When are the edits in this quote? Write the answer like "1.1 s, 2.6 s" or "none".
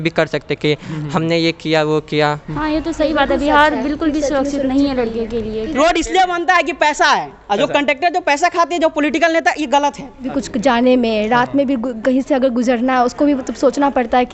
2.5 s, 5.7 s, 10.4 s